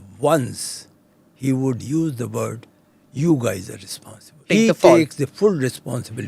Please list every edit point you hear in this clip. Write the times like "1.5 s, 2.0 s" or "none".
4.4 s